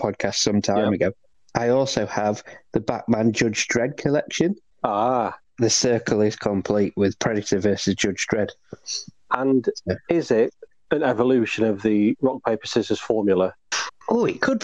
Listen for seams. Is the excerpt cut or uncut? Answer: cut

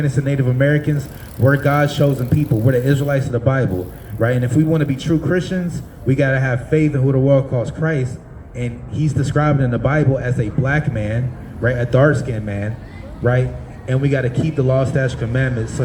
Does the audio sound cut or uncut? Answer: uncut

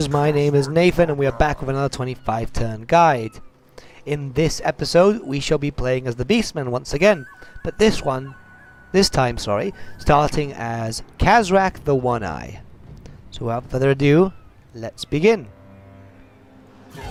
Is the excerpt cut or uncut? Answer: uncut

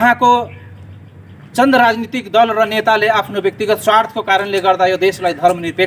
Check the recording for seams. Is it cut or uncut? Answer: uncut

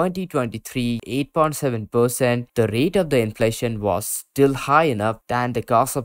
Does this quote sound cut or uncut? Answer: cut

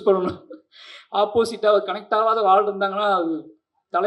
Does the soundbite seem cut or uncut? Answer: uncut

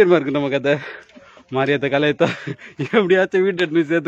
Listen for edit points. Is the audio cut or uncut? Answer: uncut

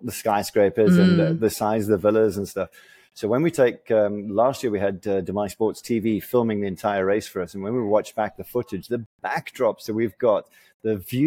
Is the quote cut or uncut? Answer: uncut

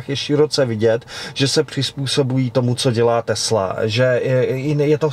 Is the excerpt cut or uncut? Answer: uncut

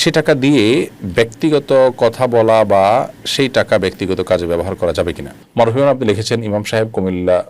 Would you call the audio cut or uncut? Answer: cut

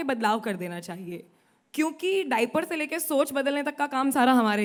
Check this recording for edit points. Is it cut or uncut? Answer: uncut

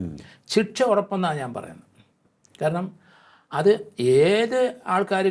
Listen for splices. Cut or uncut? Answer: uncut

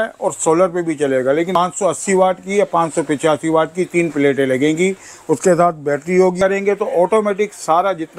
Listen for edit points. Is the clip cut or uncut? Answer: cut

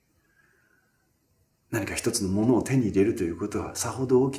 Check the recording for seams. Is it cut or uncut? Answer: uncut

